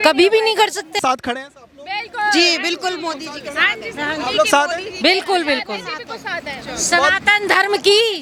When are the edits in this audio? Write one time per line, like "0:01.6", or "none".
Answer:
none